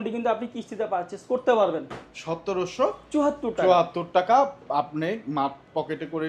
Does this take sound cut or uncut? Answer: uncut